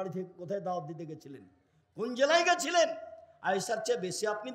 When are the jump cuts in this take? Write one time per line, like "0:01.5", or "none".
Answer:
none